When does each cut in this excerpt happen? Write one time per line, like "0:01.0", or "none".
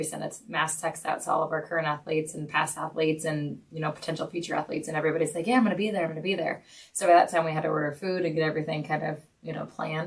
none